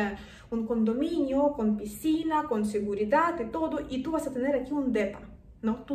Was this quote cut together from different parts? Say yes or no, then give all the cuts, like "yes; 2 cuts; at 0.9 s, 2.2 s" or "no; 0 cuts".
no; 0 cuts